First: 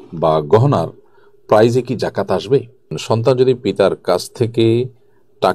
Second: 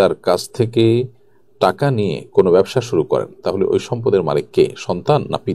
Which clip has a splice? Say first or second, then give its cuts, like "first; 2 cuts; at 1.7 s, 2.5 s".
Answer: first; 1 cut; at 2.9 s